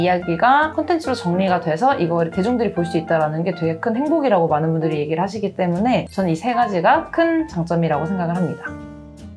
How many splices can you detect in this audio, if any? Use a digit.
0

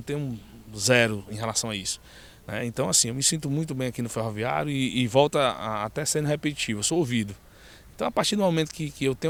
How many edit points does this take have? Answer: 0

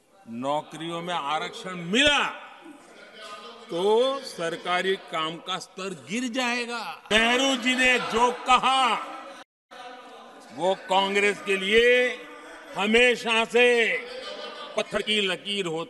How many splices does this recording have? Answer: 1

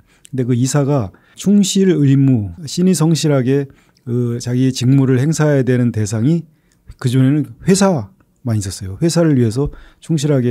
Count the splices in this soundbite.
2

